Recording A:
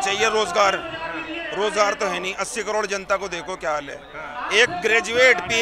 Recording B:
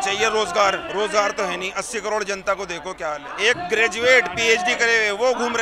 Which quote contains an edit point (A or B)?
B